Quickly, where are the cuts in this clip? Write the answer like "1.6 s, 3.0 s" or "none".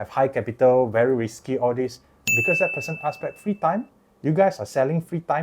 2.3 s